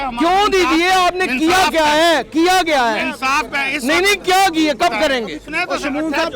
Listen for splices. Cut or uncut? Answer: cut